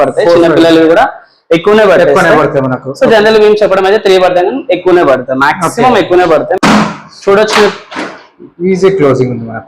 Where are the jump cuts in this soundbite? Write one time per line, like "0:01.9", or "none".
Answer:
0:06.6